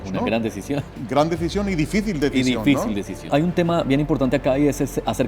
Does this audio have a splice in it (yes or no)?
yes